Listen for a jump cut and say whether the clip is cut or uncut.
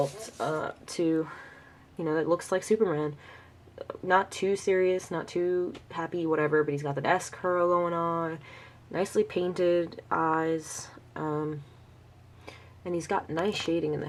uncut